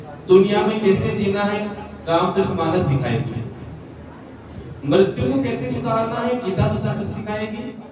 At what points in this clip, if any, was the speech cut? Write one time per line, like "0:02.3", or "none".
none